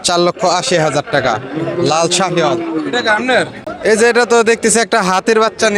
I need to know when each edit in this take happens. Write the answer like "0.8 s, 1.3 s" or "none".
3.6 s

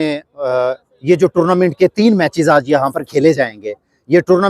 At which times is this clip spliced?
none

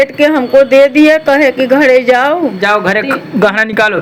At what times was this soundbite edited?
none

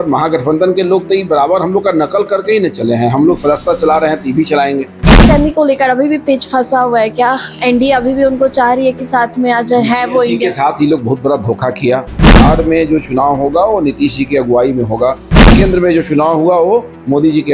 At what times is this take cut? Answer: 5.1 s, 12.4 s, 15.5 s

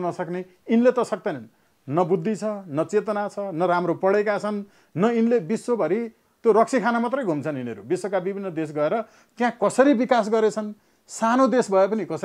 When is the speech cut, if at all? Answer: none

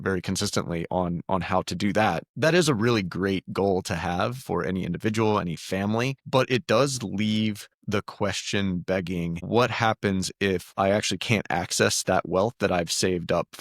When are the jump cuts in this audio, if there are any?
2.3 s, 6.2 s, 7.7 s, 9.4 s

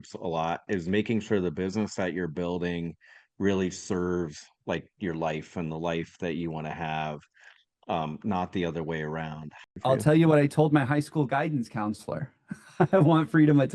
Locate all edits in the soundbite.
9.7 s

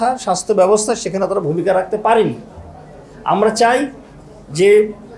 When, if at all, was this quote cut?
none

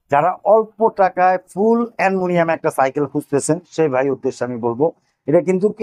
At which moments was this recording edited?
none

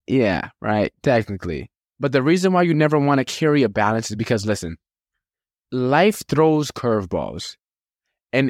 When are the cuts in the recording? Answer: 1.8 s

